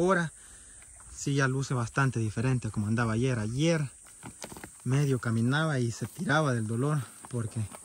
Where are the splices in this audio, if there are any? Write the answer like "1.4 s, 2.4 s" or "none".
none

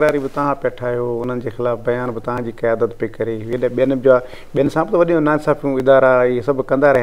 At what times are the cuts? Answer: none

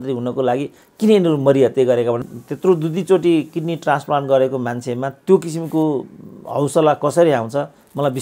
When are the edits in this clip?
2.2 s

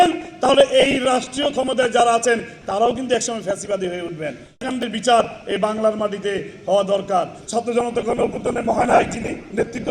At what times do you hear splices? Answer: none

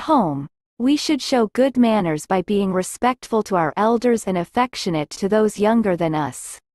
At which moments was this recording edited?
none

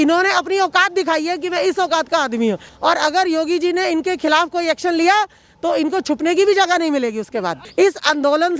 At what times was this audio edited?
2.7 s, 7.6 s

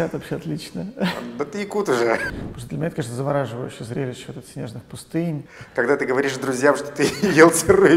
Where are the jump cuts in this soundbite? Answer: 2.2 s, 5.6 s

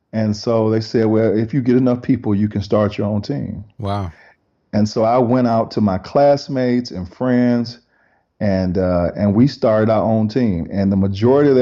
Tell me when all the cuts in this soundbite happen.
none

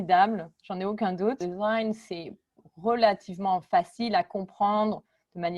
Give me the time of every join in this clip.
1.4 s

